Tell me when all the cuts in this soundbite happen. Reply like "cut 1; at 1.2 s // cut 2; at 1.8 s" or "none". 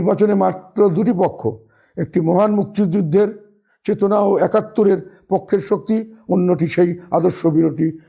none